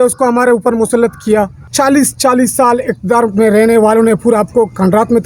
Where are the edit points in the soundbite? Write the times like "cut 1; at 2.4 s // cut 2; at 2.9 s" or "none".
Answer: cut 1; at 1.6 s